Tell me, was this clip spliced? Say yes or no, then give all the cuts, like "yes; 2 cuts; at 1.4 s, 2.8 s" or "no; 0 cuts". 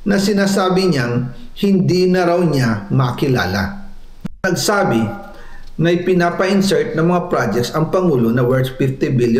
yes; 1 cut; at 4.5 s